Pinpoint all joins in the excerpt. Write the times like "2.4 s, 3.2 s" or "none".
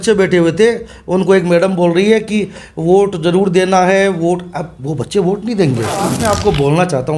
6.1 s